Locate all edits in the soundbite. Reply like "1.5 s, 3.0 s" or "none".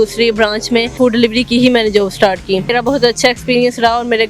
0.9 s, 2.7 s